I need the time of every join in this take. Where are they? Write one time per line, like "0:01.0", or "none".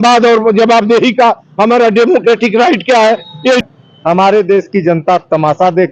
0:03.6